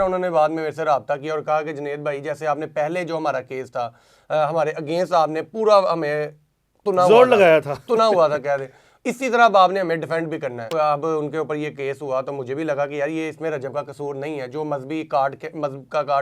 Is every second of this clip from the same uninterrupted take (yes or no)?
no